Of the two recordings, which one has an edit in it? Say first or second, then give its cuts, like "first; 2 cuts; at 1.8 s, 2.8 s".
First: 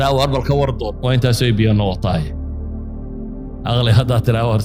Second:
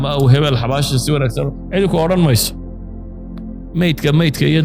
second; 2 cuts; at 2.4 s, 3.7 s